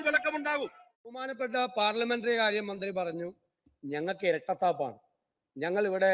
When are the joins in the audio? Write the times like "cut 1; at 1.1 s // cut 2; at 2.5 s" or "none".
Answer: cut 1; at 1.3 s